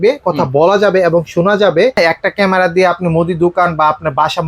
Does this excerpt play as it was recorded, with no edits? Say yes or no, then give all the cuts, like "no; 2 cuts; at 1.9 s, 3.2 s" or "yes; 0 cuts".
no; 1 cut; at 1.9 s